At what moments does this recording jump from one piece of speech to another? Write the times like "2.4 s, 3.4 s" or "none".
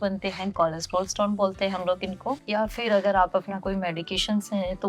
2.4 s